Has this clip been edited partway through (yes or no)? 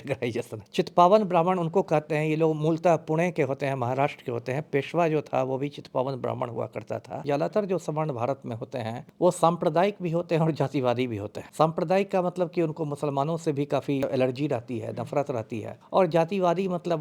yes